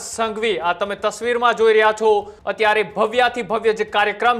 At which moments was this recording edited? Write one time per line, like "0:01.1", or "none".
0:02.4